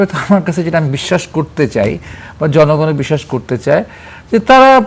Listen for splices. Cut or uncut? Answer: uncut